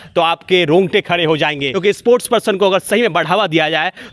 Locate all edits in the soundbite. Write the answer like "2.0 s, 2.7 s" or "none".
1.7 s